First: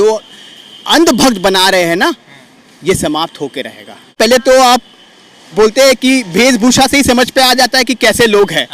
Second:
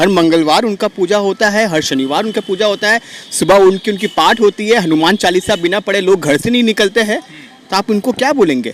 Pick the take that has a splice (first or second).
first